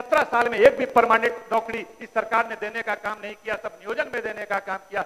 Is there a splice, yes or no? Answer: no